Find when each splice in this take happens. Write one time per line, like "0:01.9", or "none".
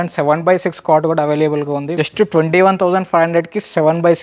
0:01.9